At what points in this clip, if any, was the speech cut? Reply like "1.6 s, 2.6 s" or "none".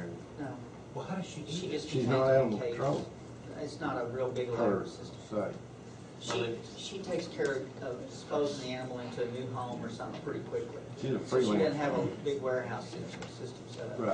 10.7 s